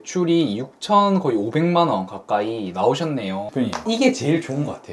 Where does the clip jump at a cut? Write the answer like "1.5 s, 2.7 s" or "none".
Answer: 3.4 s